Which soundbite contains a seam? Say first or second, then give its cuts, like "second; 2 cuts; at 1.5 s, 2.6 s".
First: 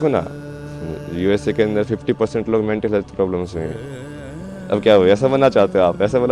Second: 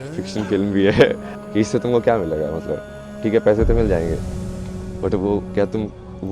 second; 1 cut; at 1.3 s